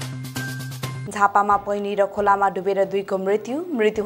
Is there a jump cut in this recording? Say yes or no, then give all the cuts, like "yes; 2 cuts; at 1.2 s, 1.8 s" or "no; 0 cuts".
no; 0 cuts